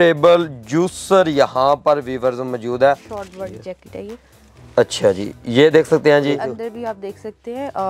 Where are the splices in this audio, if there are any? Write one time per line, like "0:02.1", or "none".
0:03.1
0:06.5